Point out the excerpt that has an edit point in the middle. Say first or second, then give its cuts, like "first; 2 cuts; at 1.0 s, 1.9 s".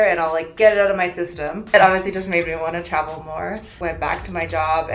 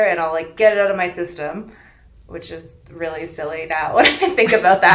first; 2 cuts; at 1.6 s, 3.7 s